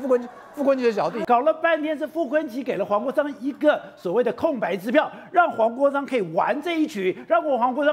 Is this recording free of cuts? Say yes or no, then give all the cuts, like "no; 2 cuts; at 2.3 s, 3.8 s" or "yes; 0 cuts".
no; 1 cut; at 1.2 s